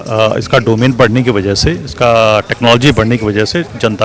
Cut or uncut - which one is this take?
uncut